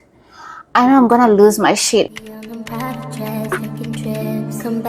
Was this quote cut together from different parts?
yes; 1 cut; at 2.1 s

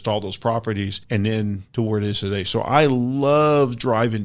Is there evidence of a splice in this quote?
yes; 2 cuts; at 1.0 s, 1.6 s

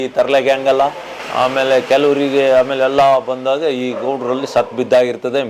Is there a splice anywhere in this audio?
no; 0 cuts

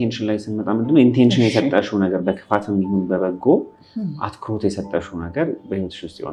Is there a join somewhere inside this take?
no; 0 cuts

